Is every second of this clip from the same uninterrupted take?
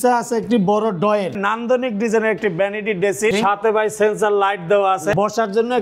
no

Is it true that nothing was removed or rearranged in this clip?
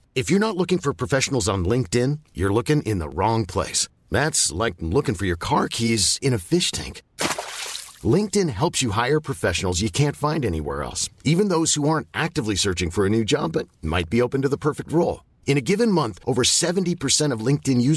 yes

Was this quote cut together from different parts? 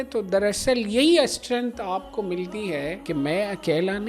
yes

